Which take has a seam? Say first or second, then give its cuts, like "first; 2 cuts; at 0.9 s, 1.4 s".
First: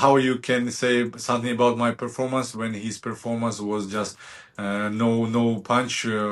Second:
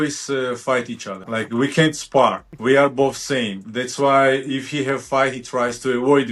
second; 2 cuts; at 1.1 s, 2.5 s